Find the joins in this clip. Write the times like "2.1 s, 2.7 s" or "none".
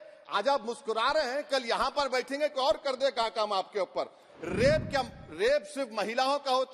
4.3 s